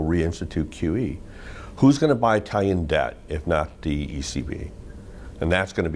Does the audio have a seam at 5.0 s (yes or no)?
no